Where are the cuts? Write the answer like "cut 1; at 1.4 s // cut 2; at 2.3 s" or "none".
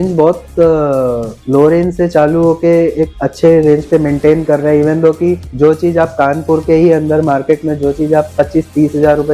none